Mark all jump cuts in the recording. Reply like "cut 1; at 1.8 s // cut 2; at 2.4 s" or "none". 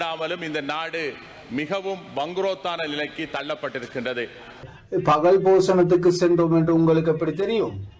cut 1; at 4.8 s